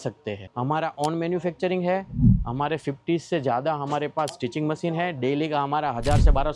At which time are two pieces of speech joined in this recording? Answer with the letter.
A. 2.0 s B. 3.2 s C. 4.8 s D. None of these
D